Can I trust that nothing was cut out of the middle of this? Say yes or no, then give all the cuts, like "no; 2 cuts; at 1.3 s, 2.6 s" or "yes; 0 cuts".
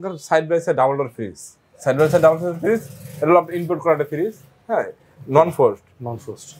yes; 0 cuts